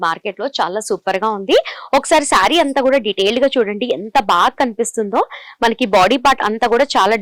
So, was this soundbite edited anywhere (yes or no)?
no